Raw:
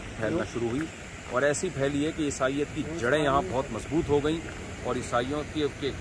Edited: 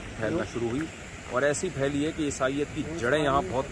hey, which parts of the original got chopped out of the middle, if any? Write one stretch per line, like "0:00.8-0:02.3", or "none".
none